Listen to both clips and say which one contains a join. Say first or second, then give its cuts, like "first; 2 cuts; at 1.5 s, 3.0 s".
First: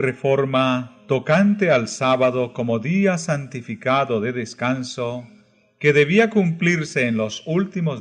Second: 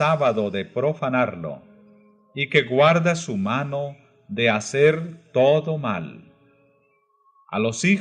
first; 1 cut; at 5.3 s